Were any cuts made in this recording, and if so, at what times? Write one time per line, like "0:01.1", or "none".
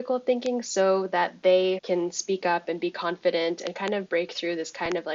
0:01.8